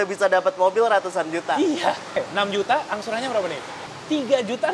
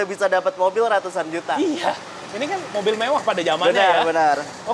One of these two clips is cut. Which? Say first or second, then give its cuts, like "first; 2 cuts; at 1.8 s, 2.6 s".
first; 2 cuts; at 2.2 s, 3.8 s